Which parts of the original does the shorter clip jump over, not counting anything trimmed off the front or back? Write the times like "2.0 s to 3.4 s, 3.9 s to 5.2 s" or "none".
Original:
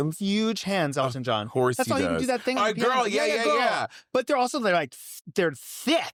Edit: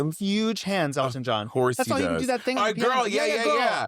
none